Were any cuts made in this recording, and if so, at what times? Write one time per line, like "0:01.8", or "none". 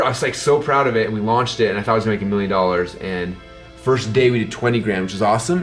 none